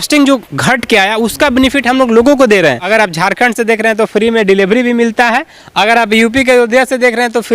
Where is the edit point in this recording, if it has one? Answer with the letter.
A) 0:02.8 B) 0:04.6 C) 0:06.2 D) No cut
A